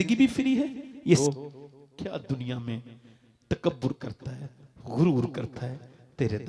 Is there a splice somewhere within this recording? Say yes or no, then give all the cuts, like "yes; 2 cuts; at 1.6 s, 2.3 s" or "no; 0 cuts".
yes; 1 cut; at 1.2 s